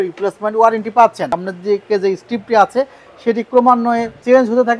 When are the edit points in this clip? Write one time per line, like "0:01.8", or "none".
0:01.3